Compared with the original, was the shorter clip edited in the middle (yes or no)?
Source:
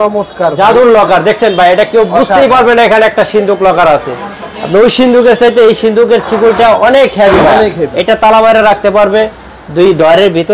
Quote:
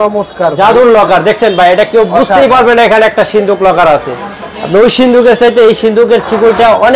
no